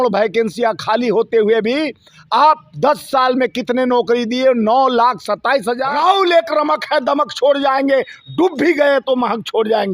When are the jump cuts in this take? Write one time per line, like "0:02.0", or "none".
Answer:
0:05.9